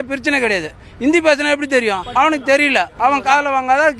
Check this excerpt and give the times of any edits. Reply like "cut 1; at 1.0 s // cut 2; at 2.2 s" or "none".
cut 1; at 2.0 s // cut 2; at 2.9 s